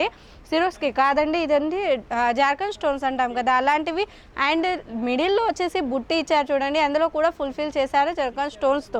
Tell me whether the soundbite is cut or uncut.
uncut